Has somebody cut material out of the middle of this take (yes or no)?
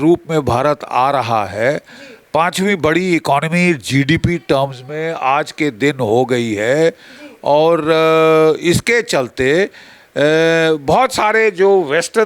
no